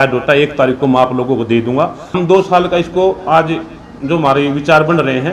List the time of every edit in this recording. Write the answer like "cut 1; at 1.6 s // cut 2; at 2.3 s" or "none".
cut 1; at 2.1 s